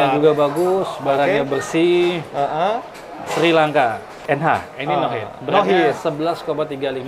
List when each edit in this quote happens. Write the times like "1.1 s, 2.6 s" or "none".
4.1 s